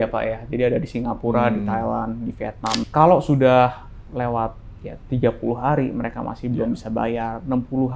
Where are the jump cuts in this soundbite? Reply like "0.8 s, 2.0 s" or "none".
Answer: 2.7 s